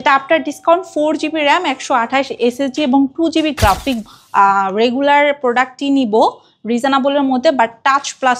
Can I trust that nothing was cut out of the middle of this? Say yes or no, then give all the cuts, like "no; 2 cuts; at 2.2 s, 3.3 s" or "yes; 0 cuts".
no; 1 cut; at 4.0 s